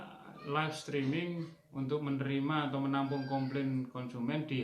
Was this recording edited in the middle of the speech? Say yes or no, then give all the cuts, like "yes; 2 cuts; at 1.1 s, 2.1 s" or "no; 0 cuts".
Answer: no; 0 cuts